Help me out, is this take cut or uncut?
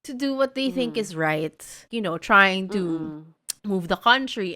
cut